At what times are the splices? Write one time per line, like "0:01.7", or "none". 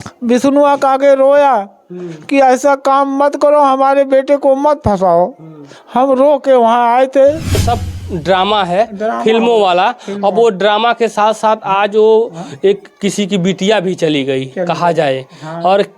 0:07.6

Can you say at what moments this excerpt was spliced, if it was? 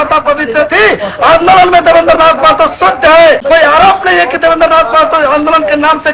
0:03.4

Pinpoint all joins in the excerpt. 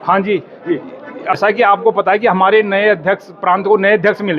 0:01.4

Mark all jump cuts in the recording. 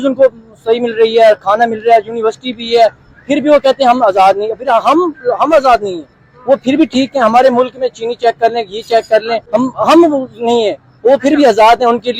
0:09.4

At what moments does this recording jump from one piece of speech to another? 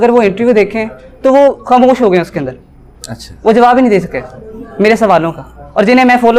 none

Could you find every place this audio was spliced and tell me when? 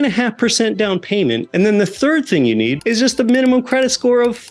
0:01.5
0:02.8

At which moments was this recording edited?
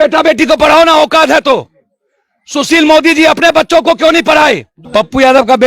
0:04.7

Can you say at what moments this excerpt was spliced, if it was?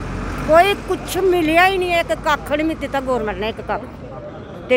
none

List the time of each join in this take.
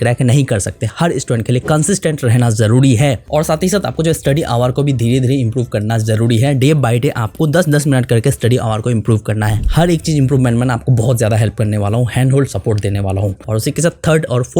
none

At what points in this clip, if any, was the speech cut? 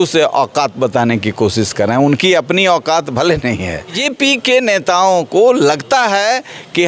0:04.0

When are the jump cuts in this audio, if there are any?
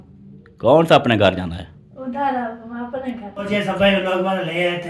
0:03.5

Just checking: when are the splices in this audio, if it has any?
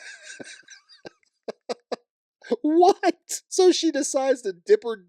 0:03.3

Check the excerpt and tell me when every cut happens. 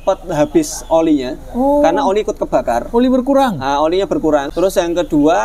0:04.5

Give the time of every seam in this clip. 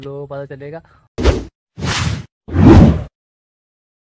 0:01.0

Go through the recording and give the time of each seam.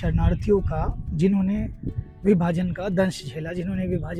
none

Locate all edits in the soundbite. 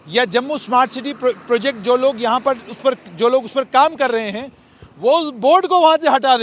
none

